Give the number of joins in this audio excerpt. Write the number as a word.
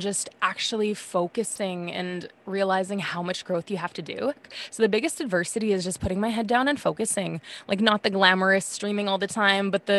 one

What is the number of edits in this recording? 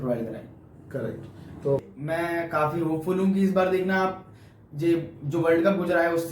one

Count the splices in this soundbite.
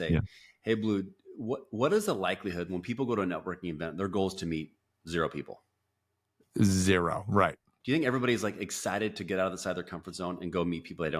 one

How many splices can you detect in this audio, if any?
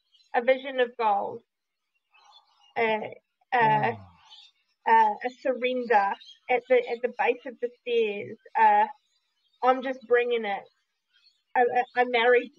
one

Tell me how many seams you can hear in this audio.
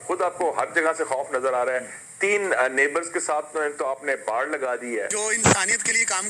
one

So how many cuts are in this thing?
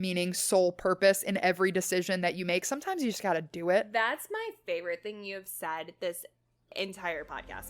one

